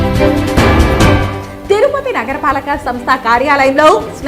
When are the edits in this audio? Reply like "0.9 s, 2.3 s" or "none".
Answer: 1.4 s